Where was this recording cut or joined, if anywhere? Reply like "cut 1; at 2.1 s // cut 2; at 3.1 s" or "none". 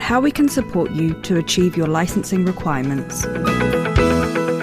cut 1; at 3.2 s